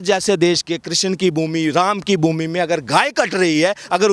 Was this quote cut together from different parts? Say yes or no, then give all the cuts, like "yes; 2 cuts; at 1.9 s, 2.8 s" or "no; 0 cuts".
no; 0 cuts